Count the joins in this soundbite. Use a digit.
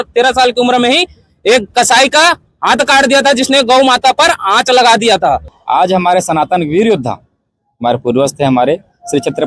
1